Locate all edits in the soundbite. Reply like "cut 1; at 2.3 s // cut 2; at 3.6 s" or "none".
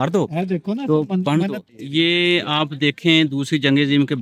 cut 1; at 1.6 s